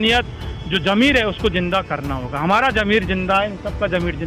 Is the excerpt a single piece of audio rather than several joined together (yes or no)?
yes